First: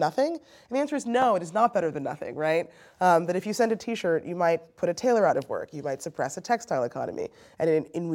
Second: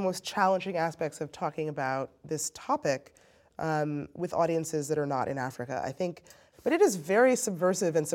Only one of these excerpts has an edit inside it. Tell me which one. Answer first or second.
second